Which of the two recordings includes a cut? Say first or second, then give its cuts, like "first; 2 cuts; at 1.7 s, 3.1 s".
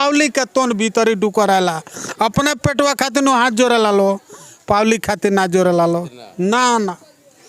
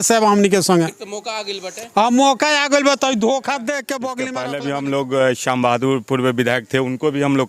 second; 1 cut; at 4.2 s